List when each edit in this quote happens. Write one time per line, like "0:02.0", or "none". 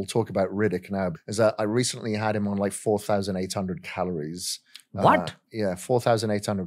0:01.2